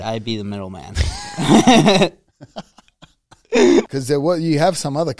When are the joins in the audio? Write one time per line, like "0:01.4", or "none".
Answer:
0:03.9